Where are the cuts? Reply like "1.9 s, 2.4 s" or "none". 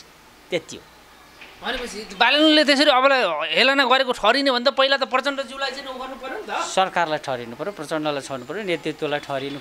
none